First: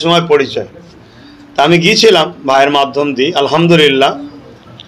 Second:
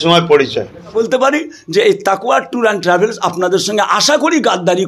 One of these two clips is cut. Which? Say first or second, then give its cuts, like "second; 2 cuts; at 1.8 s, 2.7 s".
second; 1 cut; at 0.9 s